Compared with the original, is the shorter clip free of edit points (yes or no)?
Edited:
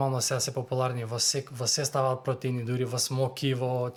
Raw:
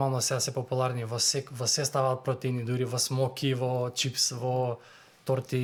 yes